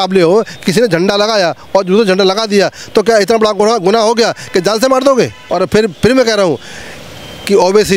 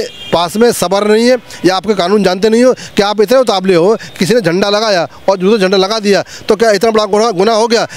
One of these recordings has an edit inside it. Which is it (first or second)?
first